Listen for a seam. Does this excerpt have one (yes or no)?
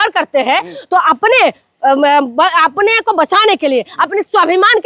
no